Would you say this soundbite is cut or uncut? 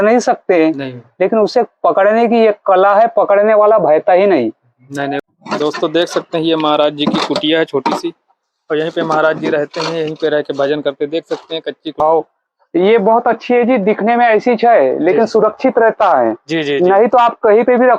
cut